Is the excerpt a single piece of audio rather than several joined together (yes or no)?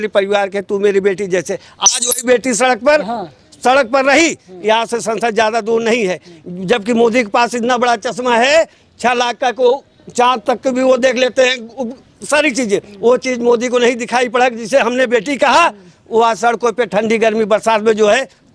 yes